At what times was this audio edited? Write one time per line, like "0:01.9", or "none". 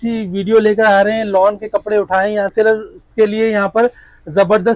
0:02.5